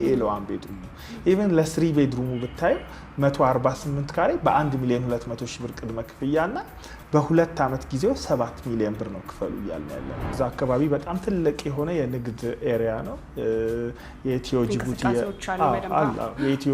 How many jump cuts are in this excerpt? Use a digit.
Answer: 1